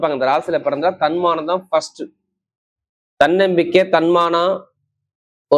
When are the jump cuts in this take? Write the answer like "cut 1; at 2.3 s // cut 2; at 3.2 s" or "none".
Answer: none